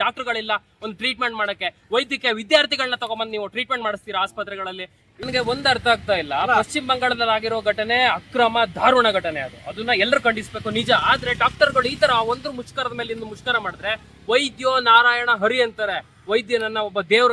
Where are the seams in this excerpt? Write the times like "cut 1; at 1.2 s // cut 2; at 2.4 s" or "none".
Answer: cut 1; at 5.3 s